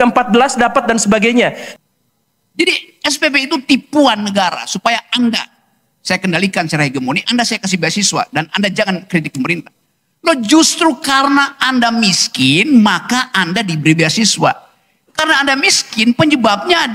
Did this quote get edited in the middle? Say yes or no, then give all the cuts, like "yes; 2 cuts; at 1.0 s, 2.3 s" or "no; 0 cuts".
yes; 1 cut; at 1.7 s